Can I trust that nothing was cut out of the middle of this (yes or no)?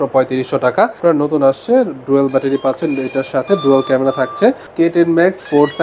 no